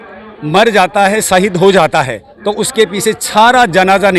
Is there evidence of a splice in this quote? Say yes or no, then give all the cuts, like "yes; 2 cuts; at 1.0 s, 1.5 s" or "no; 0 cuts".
no; 0 cuts